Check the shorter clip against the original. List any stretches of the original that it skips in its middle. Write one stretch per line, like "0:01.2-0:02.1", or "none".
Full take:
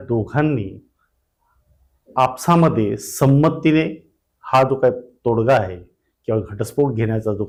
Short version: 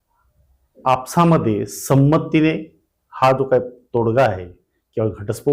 none